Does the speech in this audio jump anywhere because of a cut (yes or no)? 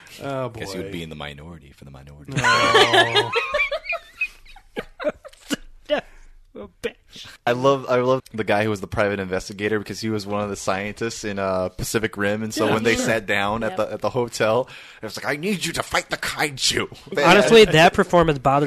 yes